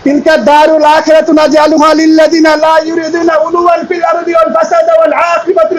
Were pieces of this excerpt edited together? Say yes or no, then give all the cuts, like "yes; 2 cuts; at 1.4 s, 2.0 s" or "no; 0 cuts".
no; 0 cuts